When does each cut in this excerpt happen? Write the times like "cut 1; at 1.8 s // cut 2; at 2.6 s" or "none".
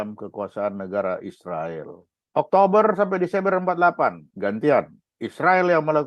cut 1; at 4.3 s